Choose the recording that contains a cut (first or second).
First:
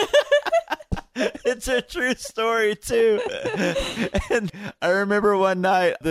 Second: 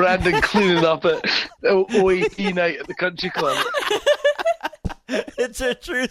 first